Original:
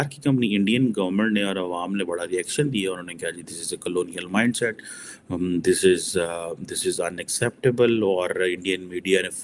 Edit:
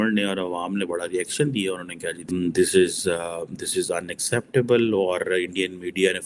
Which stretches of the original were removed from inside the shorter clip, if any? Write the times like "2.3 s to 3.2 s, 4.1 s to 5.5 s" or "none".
3.4 s to 5.3 s